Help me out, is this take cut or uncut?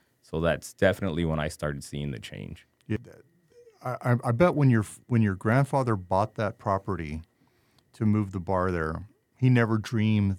cut